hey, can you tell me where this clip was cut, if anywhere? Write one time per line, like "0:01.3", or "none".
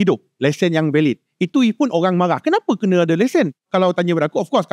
0:03.6